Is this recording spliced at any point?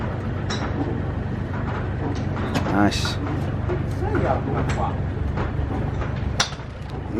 no; 0 cuts

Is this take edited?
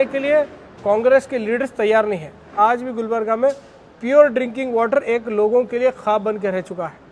yes; 1 cut; at 2.5 s

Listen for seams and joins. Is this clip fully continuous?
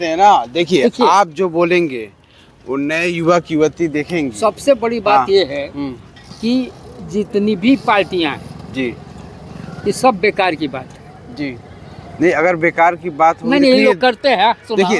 yes; 0 cuts

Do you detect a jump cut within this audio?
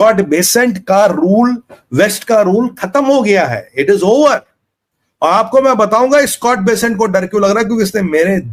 no; 0 cuts

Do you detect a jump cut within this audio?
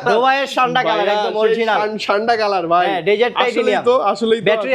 no; 0 cuts

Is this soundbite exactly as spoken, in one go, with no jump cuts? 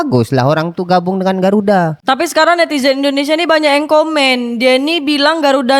yes; 0 cuts

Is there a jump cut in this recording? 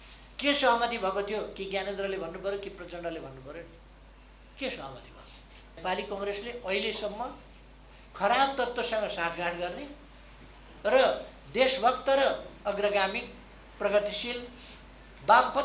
yes; 1 cut; at 5.8 s

